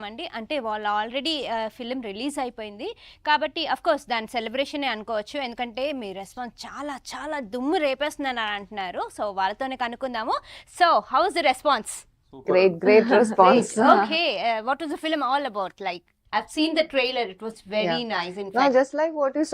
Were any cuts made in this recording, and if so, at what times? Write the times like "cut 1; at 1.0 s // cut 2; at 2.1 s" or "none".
cut 1; at 9.9 s

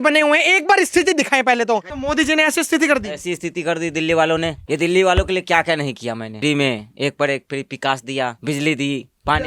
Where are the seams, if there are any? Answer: cut 1; at 1.9 s // cut 2; at 4.6 s // cut 3; at 6.4 s // cut 4; at 8.4 s

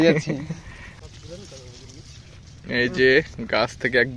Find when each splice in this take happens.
cut 1; at 1.0 s

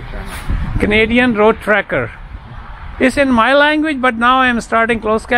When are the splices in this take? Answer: none

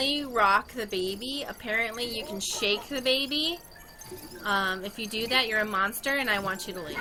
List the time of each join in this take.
none

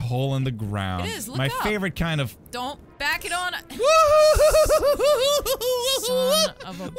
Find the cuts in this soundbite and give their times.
cut 1; at 2.9 s

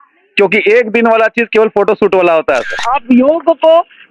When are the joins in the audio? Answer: cut 1; at 2.8 s

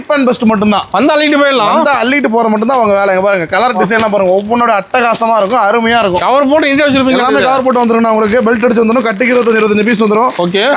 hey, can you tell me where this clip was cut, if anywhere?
none

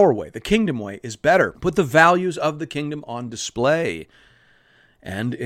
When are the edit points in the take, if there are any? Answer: cut 1; at 1.5 s

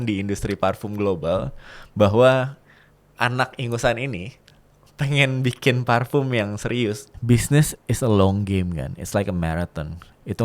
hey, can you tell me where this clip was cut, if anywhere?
cut 1; at 7.1 s

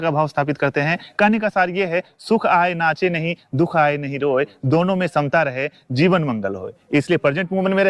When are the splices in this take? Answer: none

